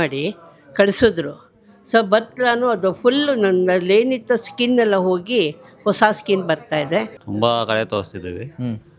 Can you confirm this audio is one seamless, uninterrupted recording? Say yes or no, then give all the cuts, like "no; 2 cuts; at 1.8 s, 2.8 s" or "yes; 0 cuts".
no; 1 cut; at 7.2 s